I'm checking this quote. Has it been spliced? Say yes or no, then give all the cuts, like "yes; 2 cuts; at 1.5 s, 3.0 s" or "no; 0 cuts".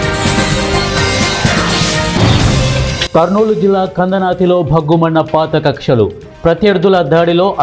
yes; 1 cut; at 2.9 s